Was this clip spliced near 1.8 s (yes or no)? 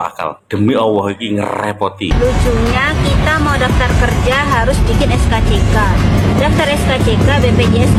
no